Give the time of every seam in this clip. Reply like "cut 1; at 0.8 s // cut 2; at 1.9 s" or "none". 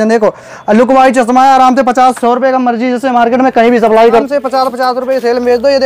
cut 1; at 4.2 s